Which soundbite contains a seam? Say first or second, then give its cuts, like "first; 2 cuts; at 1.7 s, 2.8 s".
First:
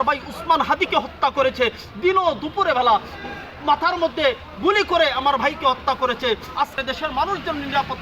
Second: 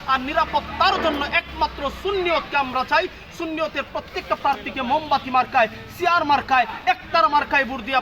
first; 1 cut; at 6.8 s